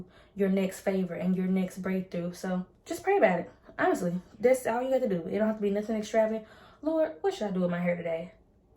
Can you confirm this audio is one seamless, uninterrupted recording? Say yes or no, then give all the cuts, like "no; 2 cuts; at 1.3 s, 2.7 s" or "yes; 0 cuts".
no; 1 cut; at 2.8 s